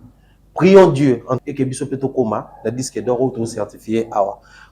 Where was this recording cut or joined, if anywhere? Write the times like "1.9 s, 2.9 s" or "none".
1.5 s